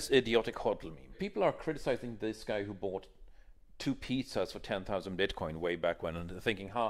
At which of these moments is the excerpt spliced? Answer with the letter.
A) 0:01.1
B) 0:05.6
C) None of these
A